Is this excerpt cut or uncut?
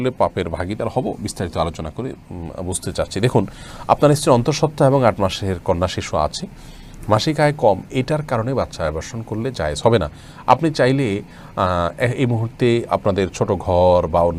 uncut